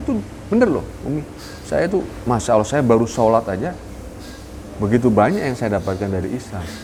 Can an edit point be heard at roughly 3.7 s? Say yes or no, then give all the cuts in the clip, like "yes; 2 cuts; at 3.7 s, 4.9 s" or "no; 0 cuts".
no; 0 cuts